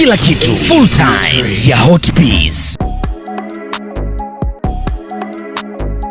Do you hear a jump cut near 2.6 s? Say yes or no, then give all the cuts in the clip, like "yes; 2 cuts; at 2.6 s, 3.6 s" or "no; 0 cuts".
yes; 2 cuts; at 2.6 s, 4.5 s